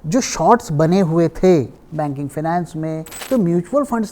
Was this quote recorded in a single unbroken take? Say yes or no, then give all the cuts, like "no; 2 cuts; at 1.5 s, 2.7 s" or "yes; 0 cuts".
no; 1 cut; at 3.1 s